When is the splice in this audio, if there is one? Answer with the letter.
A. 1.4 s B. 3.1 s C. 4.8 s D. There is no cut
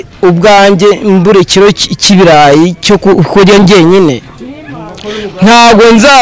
D